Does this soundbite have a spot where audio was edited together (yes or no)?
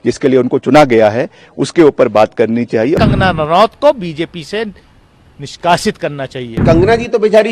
yes